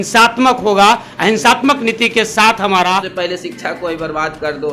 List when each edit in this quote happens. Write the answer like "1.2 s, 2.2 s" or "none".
2.9 s